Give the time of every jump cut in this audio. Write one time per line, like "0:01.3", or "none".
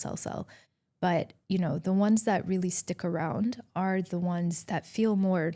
0:04.6

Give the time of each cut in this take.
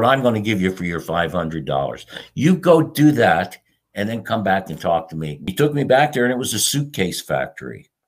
0:05.5

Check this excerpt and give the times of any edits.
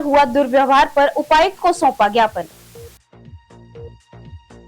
0:02.6

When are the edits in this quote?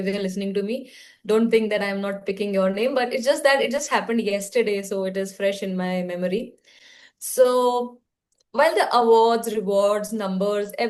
none

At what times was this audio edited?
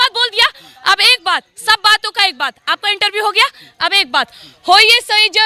none

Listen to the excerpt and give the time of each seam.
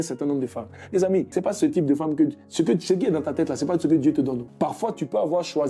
0:01.3
0:04.5

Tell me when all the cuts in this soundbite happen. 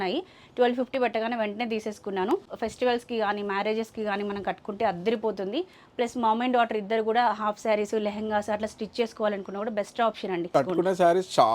0:02.6
0:10.5

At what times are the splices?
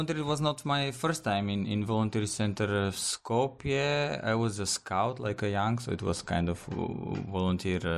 none

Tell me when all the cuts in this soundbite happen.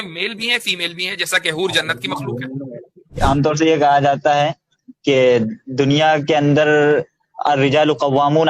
0:03.2

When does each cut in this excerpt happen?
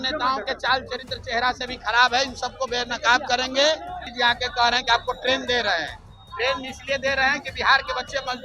0:04.1

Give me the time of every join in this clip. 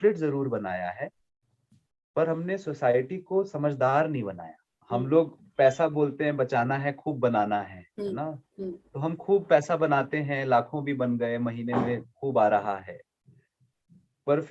0:04.7

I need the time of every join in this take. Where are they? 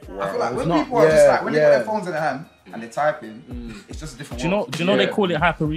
none

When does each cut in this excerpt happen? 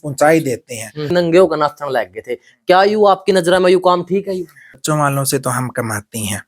0:01.1
0:04.8

